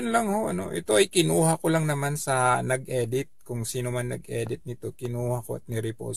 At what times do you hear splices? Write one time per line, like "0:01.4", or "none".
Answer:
0:03.3
0:05.1